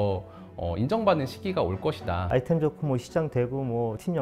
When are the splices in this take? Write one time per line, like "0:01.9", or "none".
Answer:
0:02.2